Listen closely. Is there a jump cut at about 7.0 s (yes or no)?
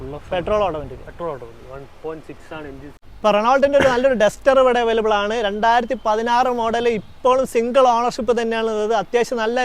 no